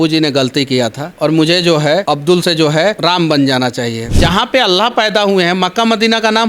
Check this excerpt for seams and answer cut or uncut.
cut